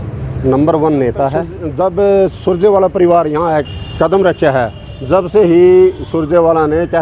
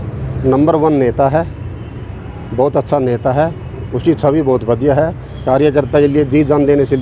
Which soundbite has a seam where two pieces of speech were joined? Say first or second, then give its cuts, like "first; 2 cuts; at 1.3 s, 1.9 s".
first; 2 cuts; at 1.6 s, 3.6 s